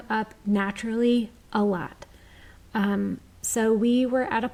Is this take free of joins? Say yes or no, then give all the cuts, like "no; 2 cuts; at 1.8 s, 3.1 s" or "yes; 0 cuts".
yes; 0 cuts